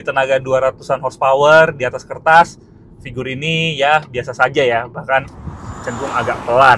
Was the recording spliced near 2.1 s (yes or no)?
no